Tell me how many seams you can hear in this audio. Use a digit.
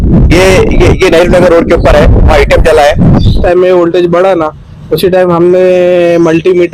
1